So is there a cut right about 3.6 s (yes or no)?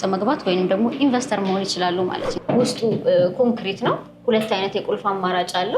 no